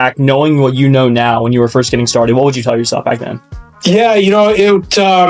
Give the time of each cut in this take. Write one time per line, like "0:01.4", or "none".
none